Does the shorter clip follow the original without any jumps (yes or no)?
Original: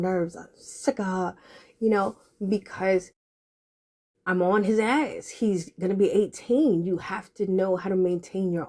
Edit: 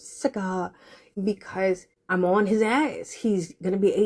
no